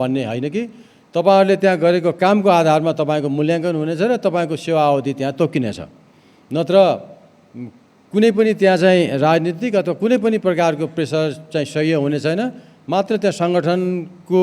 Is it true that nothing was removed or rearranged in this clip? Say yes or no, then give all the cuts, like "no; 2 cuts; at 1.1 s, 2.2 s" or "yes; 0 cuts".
yes; 0 cuts